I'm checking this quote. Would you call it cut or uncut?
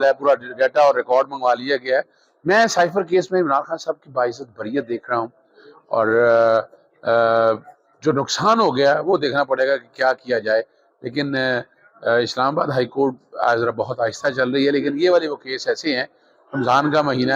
uncut